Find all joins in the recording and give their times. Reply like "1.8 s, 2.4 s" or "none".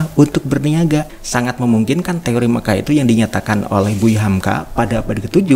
1.1 s